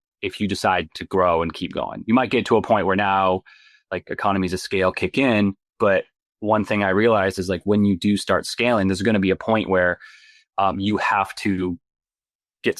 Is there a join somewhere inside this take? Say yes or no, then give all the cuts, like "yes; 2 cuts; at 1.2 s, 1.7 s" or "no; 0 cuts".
no; 0 cuts